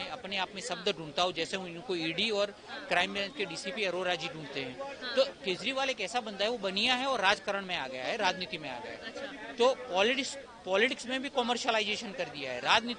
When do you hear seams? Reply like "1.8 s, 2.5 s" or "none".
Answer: none

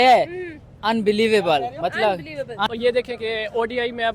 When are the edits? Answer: 2.7 s

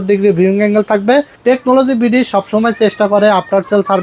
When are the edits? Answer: 1.3 s

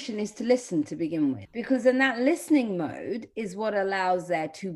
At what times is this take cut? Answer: 1.5 s

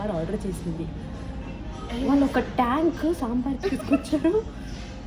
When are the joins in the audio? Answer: none

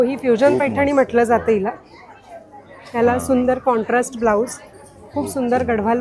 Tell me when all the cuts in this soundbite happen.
none

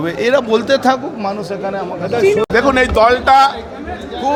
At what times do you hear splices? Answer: none

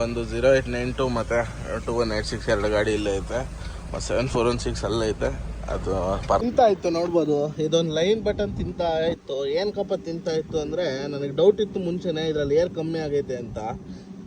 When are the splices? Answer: 6.5 s

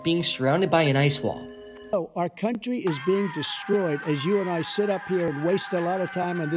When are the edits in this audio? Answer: 1.9 s

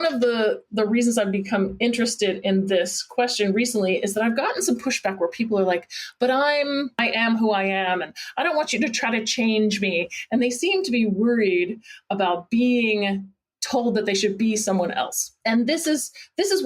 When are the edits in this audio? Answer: 7.0 s

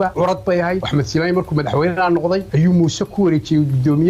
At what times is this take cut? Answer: 0.8 s, 2.5 s

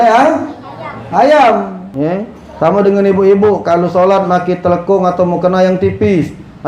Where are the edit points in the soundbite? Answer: 1.8 s

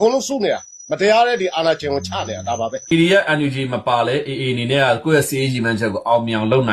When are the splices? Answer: 2.8 s

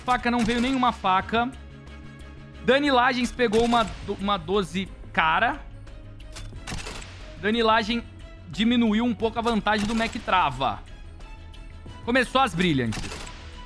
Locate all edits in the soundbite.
none

